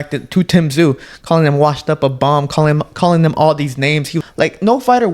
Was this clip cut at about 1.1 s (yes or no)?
no